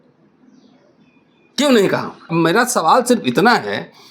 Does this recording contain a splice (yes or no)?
yes